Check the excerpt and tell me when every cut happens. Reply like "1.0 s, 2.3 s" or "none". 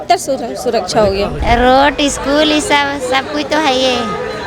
1.4 s